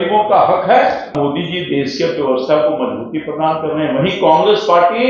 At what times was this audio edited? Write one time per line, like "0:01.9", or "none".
0:01.1